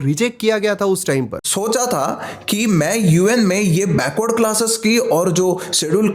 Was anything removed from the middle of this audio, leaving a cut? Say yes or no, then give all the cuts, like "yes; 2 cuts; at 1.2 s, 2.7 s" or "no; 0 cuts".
yes; 1 cut; at 1.4 s